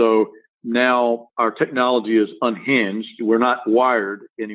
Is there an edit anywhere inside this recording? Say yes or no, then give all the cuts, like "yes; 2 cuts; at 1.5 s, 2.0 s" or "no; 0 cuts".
yes; 1 cut; at 1.3 s